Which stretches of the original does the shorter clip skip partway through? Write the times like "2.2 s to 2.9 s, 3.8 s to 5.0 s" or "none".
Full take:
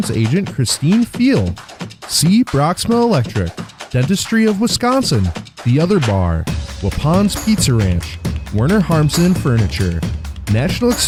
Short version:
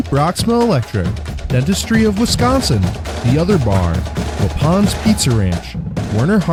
none